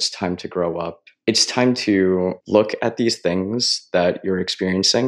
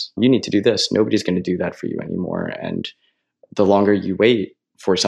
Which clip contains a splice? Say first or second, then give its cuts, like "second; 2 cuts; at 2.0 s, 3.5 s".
first; 2 cuts; at 1.0 s, 2.4 s